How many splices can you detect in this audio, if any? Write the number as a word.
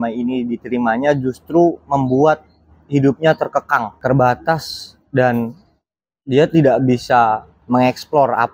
zero